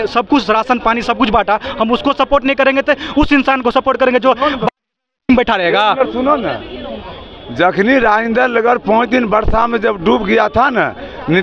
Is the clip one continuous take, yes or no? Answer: yes